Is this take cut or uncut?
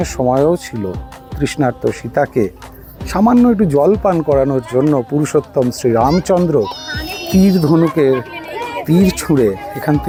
uncut